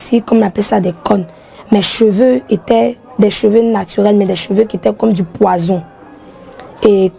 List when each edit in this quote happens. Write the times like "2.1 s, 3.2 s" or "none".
none